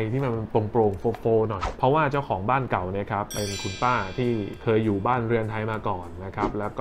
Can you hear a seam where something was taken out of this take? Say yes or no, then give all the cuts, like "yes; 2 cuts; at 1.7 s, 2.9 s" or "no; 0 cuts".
yes; 1 cut; at 1.6 s